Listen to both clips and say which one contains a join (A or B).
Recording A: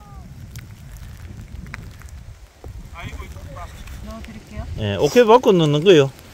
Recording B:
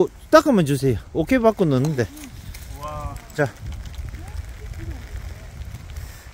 A